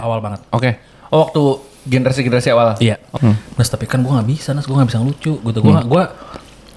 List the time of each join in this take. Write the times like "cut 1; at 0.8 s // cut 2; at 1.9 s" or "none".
cut 1; at 3.1 s